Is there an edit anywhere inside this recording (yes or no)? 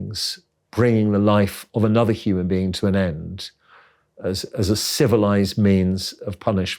no